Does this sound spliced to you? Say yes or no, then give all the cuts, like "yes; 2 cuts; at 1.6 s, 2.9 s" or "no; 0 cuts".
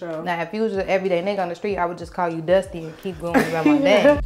no; 0 cuts